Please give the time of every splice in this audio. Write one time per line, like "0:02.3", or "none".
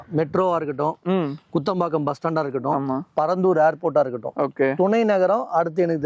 none

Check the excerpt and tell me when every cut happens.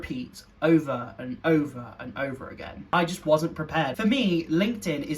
0:02.8
0:03.9

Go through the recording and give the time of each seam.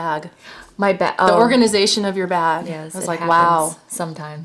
0:03.5

